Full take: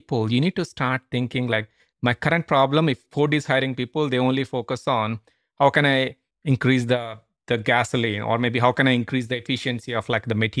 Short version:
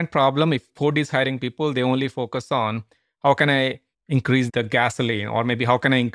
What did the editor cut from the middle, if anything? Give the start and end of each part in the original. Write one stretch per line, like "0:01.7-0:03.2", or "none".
0:06.8-0:07.4